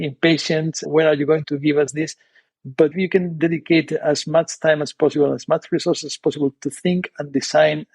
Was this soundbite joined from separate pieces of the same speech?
yes; 1 cut; at 2.9 s

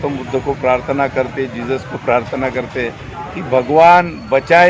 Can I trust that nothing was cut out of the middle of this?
yes; 0 cuts

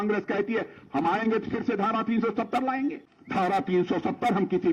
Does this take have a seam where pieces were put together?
yes; 1 cut; at 3.1 s

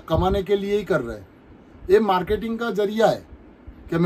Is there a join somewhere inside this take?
no; 0 cuts

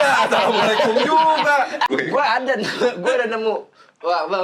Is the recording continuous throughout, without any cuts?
no; 1 cut; at 1.9 s

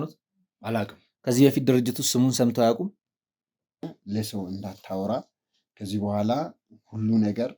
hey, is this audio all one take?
no; 1 cut; at 3.8 s

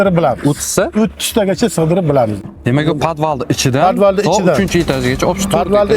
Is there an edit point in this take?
yes; 1 cut; at 2.4 s

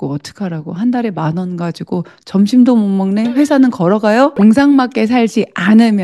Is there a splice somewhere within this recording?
yes; 1 cut; at 4.3 s

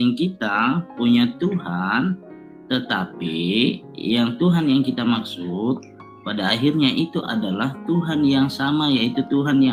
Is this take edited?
no; 0 cuts

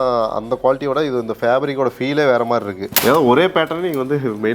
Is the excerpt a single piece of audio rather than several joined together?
no; 1 cut; at 2.8 s

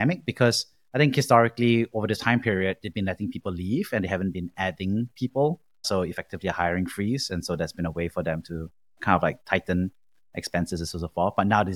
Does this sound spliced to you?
no; 0 cuts

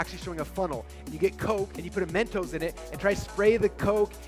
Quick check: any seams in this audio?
yes; 1 cut; at 1.8 s

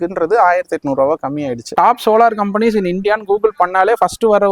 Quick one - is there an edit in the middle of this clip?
yes; 1 cut; at 1.7 s

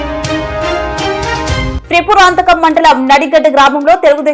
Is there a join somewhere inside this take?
no; 0 cuts

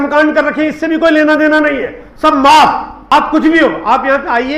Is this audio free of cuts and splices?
no; 1 cut; at 3.1 s

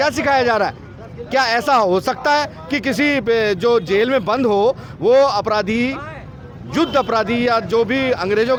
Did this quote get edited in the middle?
no; 0 cuts

